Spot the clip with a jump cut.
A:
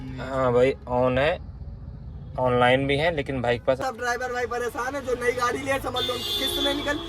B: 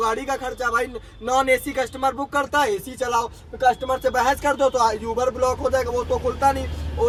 A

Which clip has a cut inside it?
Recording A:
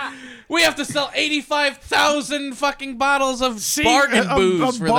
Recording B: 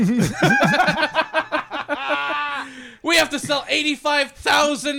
A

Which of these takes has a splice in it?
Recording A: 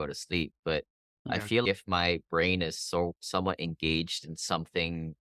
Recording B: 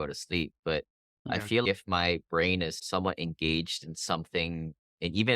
B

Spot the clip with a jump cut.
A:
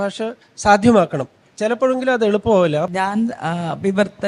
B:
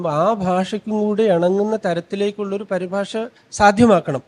A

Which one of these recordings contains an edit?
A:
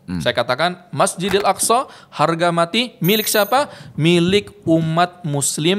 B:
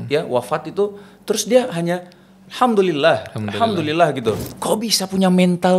B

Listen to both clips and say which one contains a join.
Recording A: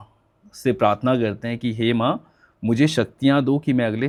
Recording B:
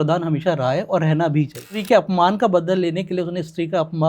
B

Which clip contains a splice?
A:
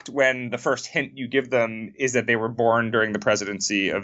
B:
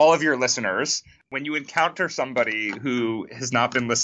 B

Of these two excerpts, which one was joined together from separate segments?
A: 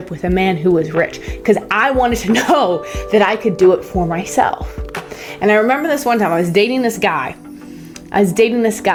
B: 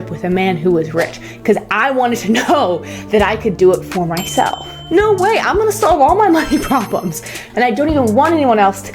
B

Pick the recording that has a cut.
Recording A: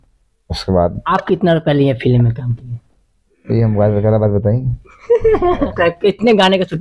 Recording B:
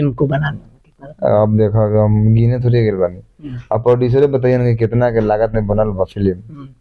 A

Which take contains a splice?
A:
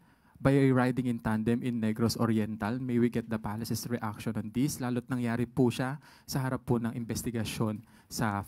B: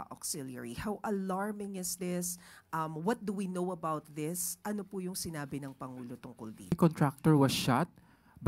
B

